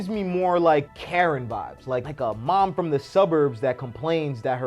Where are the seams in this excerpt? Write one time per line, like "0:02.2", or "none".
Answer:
0:00.9
0:02.1